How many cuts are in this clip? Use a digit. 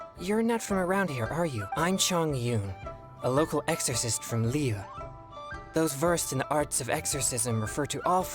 1